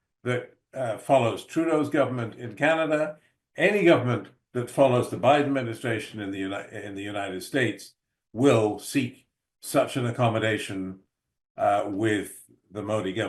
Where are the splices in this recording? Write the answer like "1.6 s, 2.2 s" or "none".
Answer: none